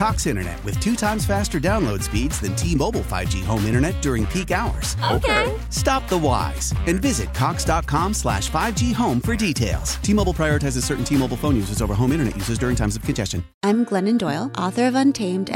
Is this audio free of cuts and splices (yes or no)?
no